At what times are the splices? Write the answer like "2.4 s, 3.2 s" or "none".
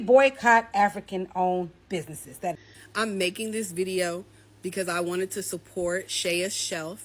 2.7 s